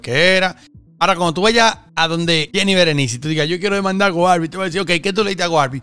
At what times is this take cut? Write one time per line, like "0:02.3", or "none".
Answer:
0:02.5